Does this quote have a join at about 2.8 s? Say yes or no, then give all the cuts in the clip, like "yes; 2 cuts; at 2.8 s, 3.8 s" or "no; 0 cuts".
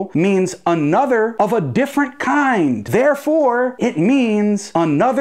yes; 1 cut; at 2.8 s